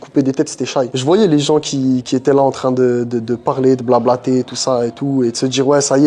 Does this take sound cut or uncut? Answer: cut